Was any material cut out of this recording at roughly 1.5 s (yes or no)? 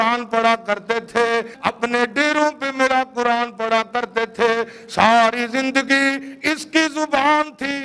yes